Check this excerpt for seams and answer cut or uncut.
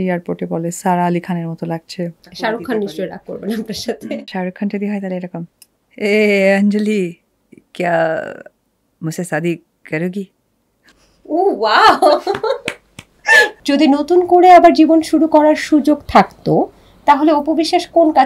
cut